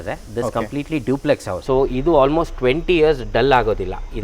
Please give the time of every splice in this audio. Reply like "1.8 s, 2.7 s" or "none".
1.5 s

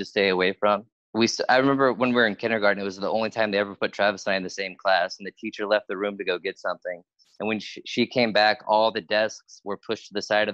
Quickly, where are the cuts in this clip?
1.0 s

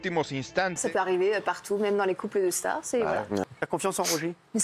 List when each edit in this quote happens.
0.8 s, 3.5 s

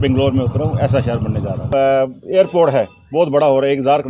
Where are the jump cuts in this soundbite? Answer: 1.7 s

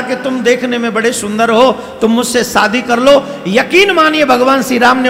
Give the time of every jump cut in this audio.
none

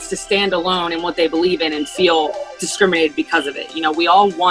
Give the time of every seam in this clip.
none

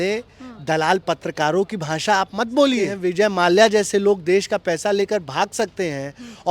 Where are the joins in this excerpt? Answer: 2.9 s

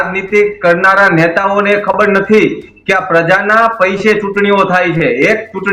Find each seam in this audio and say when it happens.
none

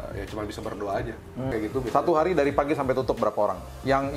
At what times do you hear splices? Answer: 1.5 s

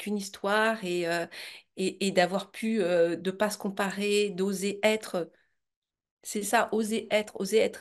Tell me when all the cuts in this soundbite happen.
none

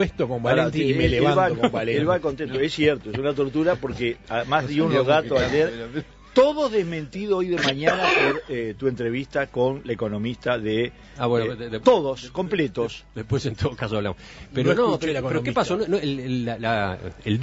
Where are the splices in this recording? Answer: 11.4 s

